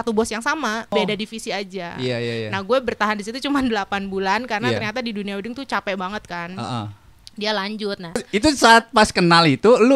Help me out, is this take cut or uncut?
cut